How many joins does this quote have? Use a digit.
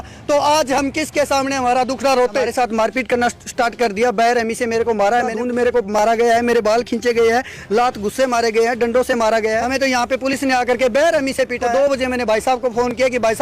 4